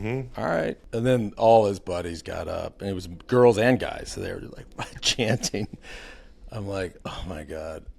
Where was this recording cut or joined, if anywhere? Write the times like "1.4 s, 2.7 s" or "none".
0.8 s, 7.0 s